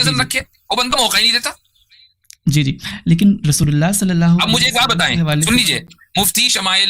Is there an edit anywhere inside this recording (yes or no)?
no